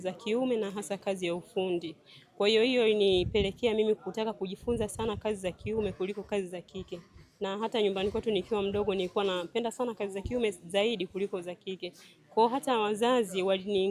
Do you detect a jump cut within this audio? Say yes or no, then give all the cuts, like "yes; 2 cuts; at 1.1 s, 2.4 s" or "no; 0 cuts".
no; 0 cuts